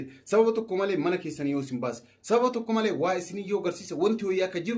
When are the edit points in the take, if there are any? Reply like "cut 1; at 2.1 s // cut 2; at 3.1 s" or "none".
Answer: none